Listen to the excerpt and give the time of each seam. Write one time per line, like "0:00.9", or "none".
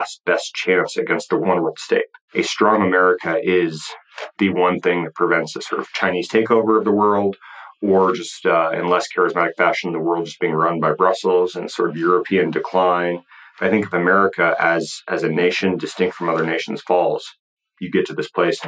0:01.4
0:02.2